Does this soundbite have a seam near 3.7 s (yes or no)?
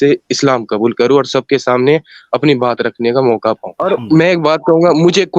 yes